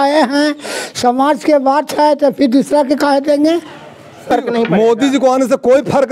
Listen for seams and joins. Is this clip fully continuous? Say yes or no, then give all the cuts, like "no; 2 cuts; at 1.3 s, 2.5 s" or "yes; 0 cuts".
no; 1 cut; at 4.3 s